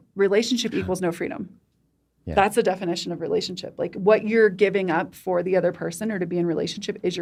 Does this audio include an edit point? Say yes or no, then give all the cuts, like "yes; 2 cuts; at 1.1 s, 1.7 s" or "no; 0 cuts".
no; 0 cuts